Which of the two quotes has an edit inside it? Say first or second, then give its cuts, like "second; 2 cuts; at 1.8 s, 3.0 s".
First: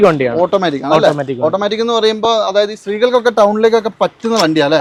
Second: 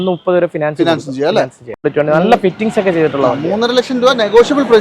second; 1 cut; at 1.8 s